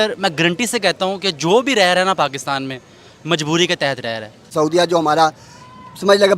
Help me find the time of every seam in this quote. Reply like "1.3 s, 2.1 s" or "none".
4.5 s